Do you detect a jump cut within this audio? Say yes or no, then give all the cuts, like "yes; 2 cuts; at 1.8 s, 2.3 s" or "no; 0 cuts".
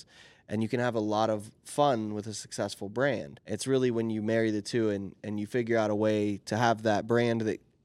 yes; 1 cut; at 3.3 s